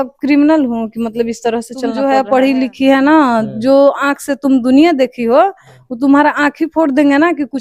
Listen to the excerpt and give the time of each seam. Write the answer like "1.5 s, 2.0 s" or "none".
2.0 s